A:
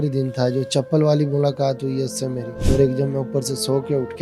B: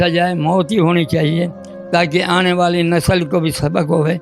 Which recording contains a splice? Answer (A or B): A